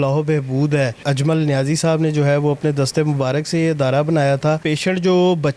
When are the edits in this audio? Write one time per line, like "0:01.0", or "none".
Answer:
0:01.0
0:04.6